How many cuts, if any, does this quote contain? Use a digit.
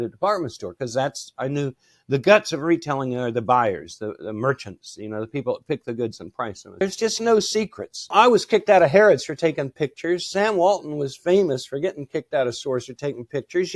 2